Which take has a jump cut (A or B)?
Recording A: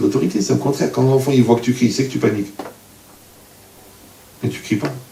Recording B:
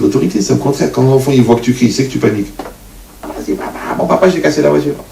B